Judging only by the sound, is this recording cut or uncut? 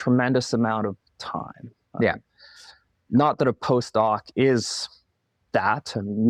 uncut